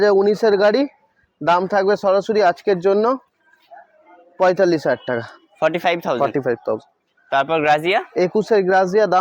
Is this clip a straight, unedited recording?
yes; 0 cuts

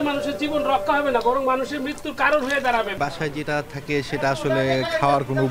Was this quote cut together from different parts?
yes; 1 cut; at 2.9 s

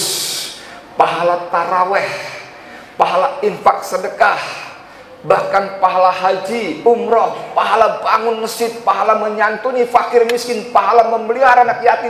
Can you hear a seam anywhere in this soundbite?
no; 0 cuts

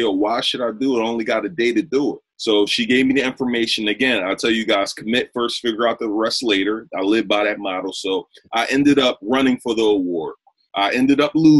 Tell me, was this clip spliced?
no; 0 cuts

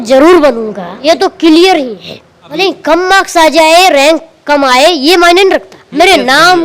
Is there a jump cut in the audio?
yes; 3 cuts; at 0.9 s, 2.4 s, 5.8 s

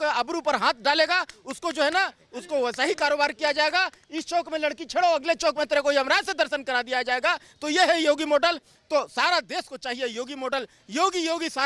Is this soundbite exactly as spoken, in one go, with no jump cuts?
no; 1 cut; at 8.7 s

